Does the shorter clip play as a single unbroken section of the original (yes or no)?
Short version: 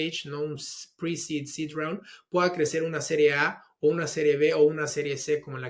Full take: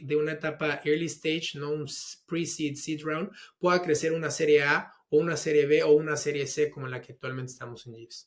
yes